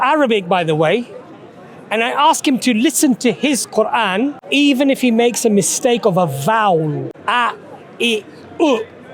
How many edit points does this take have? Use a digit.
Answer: 2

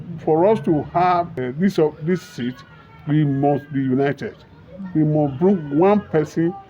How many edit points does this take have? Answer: 1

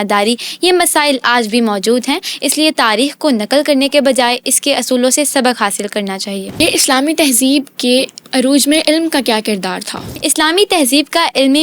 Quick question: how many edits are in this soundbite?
3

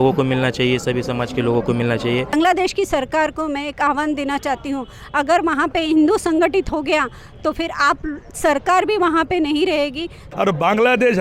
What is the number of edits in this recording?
2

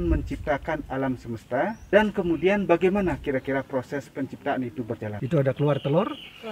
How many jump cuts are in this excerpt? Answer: 2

